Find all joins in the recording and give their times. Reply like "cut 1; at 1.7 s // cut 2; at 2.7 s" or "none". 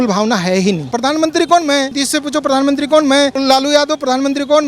cut 1; at 0.9 s // cut 2; at 2.0 s // cut 3; at 3.4 s